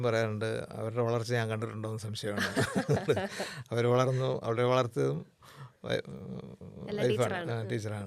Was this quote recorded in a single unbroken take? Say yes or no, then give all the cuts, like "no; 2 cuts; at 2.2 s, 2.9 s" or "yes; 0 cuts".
yes; 0 cuts